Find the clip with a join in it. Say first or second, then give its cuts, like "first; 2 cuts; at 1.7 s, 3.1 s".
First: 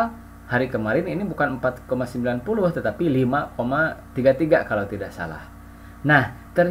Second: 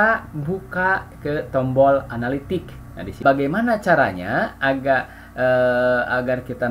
second; 1 cut; at 3.2 s